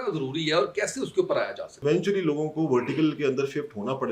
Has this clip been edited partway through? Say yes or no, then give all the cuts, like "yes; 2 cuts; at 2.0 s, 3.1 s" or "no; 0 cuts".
yes; 1 cut; at 1.8 s